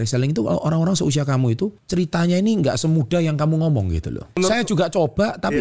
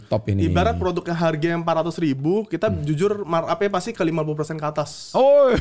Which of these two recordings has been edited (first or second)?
first